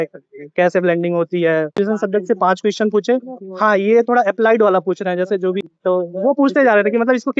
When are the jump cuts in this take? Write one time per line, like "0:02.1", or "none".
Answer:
0:01.7
0:05.6